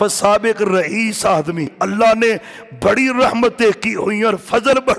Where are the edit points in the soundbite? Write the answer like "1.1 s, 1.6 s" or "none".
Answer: 1.7 s